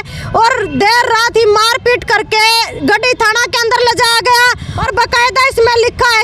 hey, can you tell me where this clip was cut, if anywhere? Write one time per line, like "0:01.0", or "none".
0:04.7